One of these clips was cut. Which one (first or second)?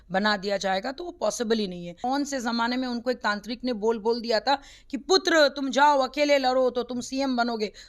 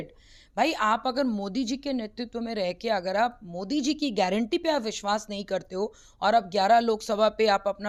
first